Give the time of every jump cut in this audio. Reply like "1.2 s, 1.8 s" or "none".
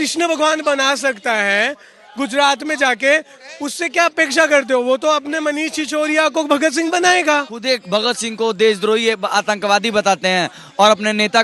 7.5 s